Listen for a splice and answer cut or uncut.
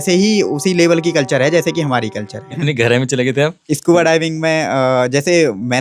cut